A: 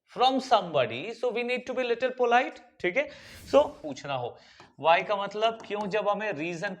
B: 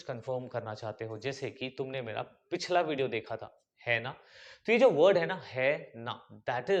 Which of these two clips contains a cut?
A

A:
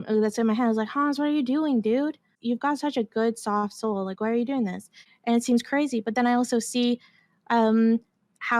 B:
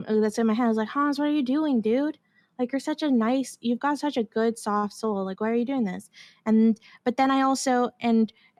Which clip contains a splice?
A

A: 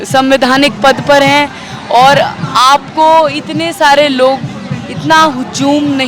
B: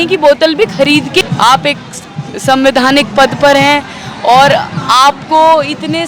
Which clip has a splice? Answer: B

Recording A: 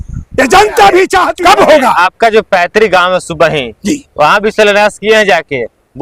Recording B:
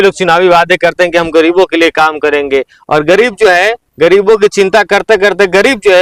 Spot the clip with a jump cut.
A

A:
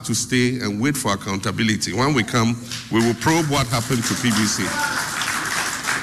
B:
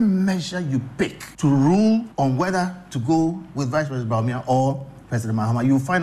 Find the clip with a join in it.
B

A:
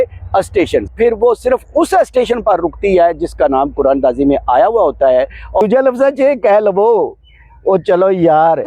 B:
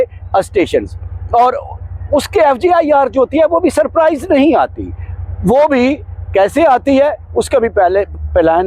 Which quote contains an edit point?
A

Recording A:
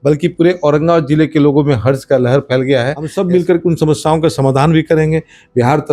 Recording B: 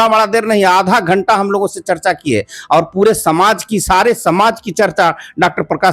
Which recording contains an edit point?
A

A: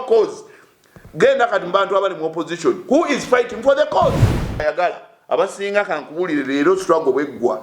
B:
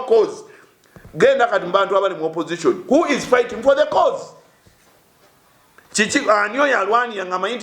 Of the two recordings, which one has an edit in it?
A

